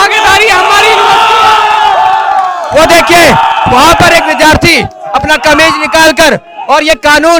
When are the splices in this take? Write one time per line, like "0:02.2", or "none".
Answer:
none